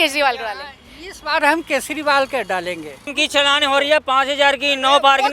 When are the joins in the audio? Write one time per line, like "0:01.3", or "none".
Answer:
0:03.1